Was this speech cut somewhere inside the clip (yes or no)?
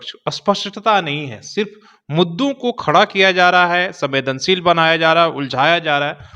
no